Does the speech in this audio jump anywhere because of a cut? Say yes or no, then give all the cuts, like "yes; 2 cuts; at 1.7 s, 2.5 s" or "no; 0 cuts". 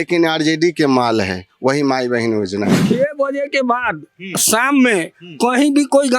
yes; 1 cut; at 2.8 s